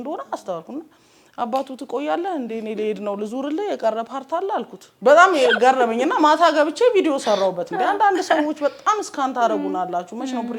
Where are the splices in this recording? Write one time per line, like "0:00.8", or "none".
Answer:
0:04.8